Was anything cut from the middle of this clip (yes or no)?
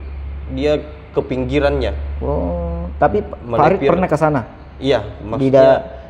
no